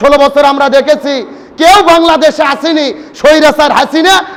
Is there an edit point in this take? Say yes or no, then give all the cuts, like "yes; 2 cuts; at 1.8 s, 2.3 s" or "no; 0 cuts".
no; 0 cuts